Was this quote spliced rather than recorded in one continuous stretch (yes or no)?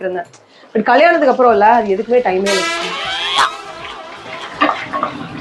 no